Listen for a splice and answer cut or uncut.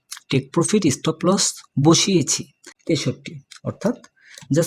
cut